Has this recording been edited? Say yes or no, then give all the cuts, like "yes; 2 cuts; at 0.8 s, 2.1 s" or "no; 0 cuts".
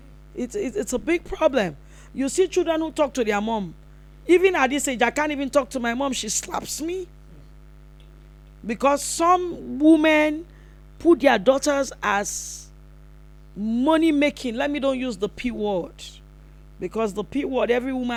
no; 0 cuts